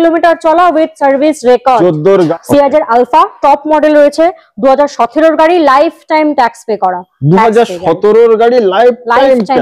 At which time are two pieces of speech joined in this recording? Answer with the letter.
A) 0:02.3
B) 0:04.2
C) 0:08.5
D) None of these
A